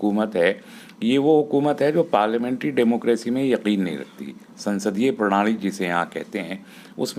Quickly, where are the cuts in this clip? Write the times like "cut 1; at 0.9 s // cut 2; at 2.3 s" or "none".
none